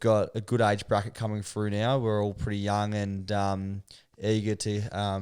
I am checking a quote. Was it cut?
no; 0 cuts

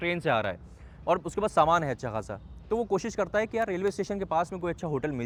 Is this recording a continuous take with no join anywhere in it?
yes; 0 cuts

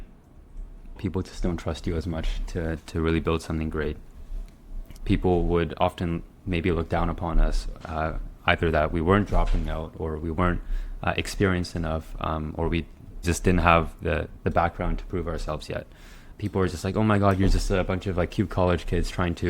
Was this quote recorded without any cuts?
no; 5 cuts; at 1.0 s, 4.8 s, 13.2 s, 14.3 s, 16.2 s

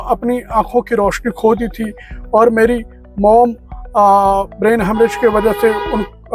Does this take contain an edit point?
no; 0 cuts

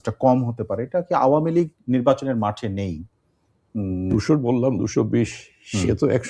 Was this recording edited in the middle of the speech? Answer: yes; 1 cut; at 4.1 s

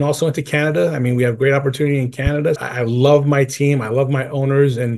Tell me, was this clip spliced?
yes; 1 cut; at 2.6 s

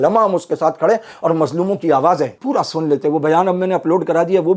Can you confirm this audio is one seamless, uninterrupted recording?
no; 1 cut; at 2.4 s

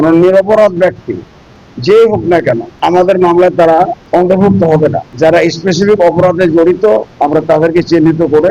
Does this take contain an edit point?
yes; 4 cuts; at 2.7 s, 4.0 s, 5.1 s, 7.1 s

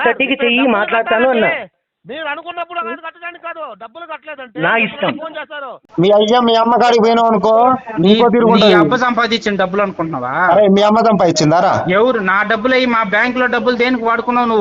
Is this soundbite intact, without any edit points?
no; 1 cut; at 5.8 s

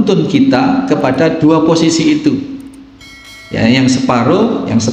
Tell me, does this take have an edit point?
yes; 1 cut; at 1.4 s

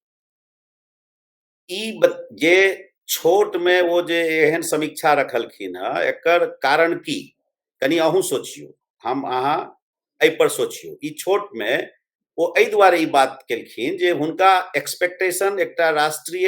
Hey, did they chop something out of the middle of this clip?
no; 0 cuts

